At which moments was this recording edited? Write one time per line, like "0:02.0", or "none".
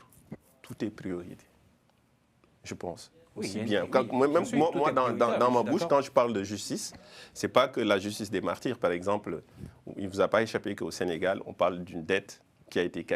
none